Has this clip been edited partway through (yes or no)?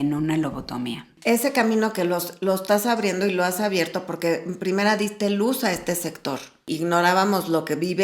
yes